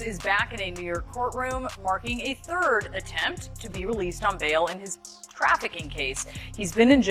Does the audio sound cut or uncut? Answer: uncut